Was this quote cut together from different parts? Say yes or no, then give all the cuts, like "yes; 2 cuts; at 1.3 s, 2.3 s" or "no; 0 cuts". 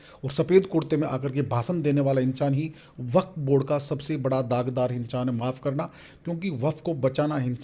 no; 0 cuts